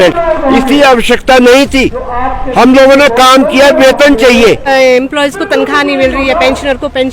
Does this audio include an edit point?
yes; 1 cut; at 4.6 s

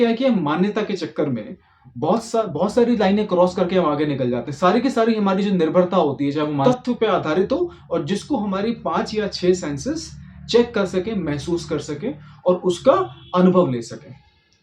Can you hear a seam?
yes; 1 cut; at 6.6 s

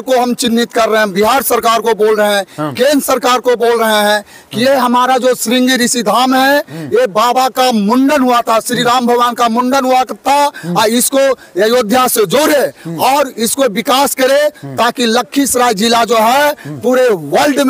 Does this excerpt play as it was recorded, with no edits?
yes; 0 cuts

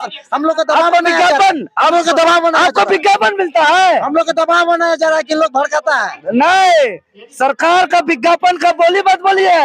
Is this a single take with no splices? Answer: yes; 0 cuts

